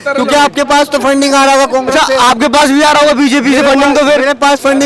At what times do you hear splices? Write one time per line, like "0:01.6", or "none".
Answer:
none